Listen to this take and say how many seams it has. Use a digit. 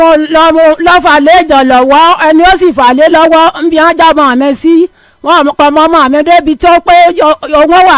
0